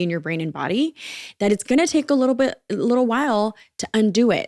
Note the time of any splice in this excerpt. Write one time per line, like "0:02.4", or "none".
none